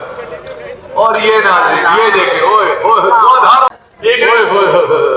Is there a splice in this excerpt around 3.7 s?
yes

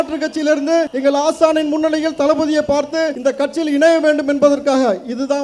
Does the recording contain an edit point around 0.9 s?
yes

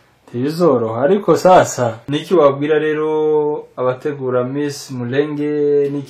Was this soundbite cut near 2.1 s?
yes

